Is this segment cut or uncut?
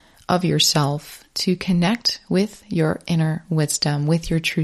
uncut